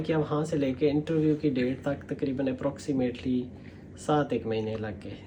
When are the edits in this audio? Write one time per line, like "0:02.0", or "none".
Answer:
none

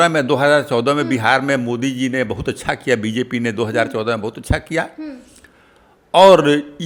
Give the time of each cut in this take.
none

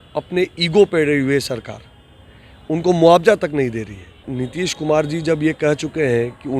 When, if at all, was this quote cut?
0:04.2

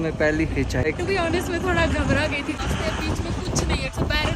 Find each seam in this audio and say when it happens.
0:00.8
0:02.6

